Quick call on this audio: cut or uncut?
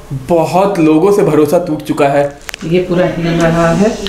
cut